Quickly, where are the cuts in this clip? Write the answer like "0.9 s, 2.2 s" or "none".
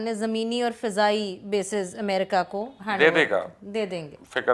none